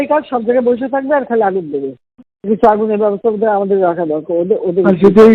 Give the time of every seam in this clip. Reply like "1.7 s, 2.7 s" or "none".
none